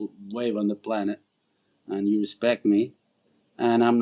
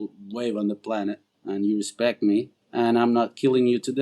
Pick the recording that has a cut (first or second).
second